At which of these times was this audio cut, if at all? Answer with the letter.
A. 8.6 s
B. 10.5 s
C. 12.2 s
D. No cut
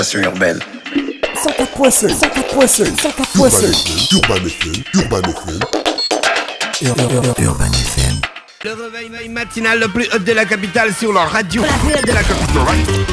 A